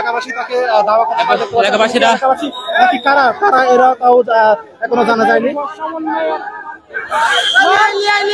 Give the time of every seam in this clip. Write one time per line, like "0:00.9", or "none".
none